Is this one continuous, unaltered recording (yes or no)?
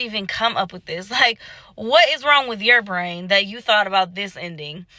yes